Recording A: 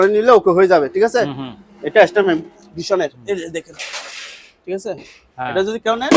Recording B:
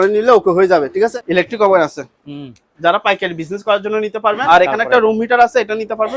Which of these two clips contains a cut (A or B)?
B